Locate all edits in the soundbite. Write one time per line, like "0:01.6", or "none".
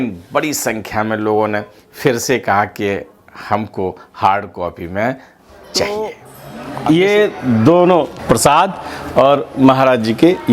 0:05.8
0:08.2